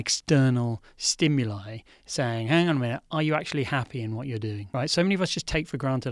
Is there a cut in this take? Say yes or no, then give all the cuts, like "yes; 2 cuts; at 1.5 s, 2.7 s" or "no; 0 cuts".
yes; 1 cut; at 4.6 s